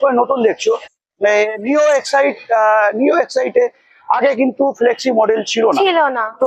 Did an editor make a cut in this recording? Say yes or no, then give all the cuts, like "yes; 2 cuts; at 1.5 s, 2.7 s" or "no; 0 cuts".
no; 0 cuts